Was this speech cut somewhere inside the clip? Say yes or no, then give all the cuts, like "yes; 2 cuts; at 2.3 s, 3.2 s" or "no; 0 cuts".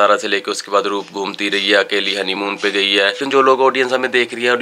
yes; 1 cut; at 3.2 s